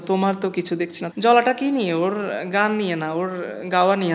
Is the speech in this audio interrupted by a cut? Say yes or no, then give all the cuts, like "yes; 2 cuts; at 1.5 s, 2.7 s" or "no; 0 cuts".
yes; 1 cut; at 1.0 s